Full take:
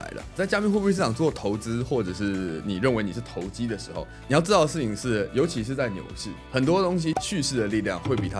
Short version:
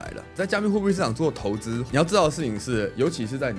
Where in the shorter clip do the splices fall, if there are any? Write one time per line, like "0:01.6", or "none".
0:01.8